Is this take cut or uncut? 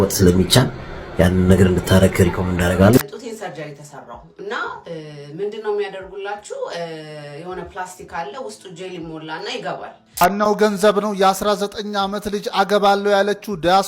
cut